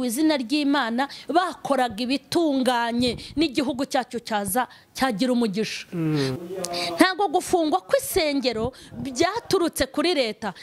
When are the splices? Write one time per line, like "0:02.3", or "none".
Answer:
0:06.3